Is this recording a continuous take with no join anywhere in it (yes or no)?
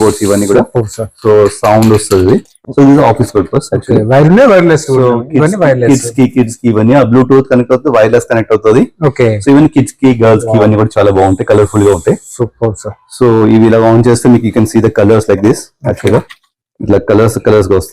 yes